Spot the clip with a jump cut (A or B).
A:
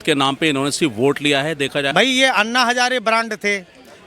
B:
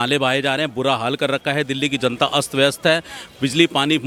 A